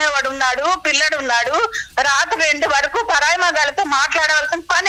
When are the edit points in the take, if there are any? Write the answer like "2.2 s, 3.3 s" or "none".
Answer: none